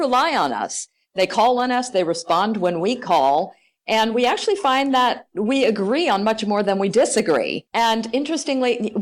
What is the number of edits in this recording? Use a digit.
1